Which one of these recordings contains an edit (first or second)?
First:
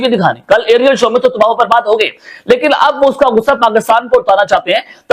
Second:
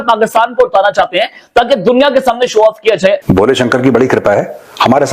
second